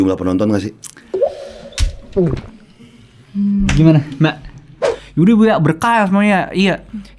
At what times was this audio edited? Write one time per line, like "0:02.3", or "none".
0:05.0